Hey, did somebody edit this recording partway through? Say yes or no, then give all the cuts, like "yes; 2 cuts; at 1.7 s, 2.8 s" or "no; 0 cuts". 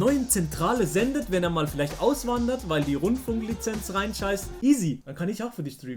yes; 1 cut; at 4.5 s